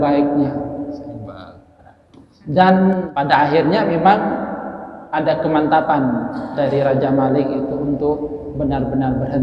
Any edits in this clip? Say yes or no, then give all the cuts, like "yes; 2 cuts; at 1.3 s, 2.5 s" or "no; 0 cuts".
yes; 1 cut; at 3.1 s